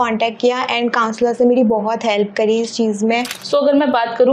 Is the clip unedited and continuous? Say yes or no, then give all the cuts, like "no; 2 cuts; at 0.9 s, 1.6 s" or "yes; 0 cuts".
no; 1 cut; at 3.4 s